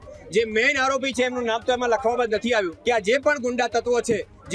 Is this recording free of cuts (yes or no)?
no